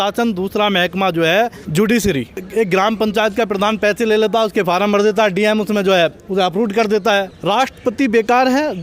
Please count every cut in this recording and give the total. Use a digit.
3